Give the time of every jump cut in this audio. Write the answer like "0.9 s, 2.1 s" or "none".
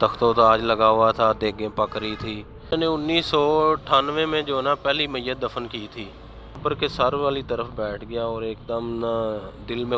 2.7 s, 6.6 s